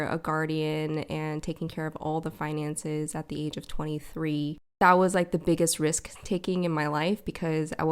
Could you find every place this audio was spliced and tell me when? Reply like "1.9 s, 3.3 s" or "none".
4.8 s

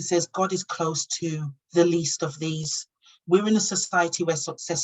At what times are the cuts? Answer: none

